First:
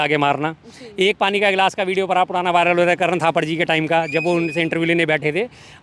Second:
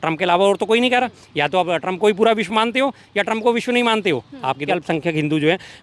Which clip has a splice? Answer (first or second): second